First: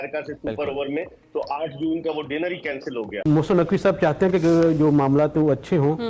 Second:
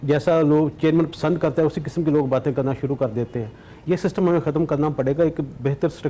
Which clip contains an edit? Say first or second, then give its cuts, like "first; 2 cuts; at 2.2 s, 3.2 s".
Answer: first; 1 cut; at 3.1 s